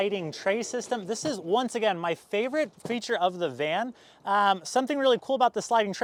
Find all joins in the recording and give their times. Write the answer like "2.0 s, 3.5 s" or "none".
none